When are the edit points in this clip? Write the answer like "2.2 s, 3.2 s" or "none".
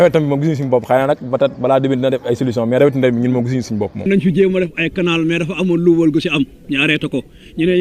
4.1 s